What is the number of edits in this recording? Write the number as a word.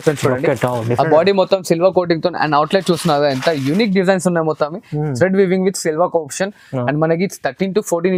zero